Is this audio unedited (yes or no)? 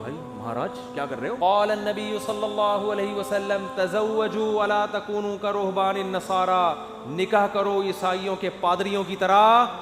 no